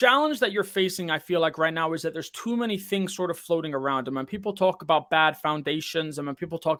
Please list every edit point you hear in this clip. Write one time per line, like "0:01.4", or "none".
none

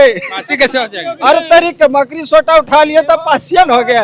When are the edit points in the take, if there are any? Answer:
none

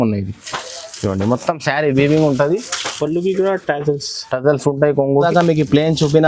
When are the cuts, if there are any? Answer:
0:05.2

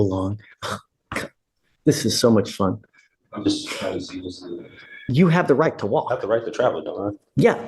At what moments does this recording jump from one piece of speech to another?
0:04.9

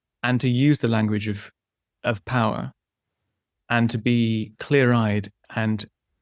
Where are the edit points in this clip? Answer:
none

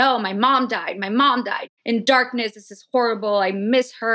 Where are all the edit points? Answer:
0:01.6

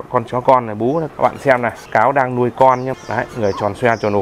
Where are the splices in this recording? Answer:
0:01.4
0:03.0

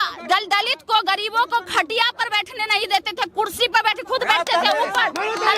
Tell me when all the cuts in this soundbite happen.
none

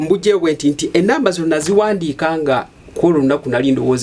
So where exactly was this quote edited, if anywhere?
none

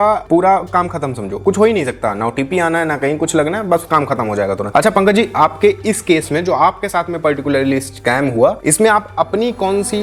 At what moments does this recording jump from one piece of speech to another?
none

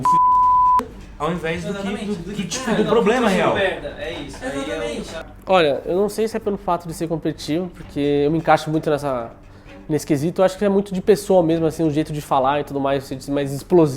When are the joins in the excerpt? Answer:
0:01.0
0:05.2

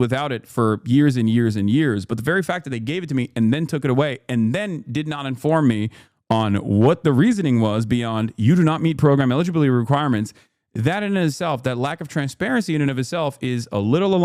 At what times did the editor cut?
none

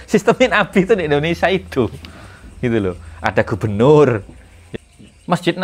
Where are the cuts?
0:04.6

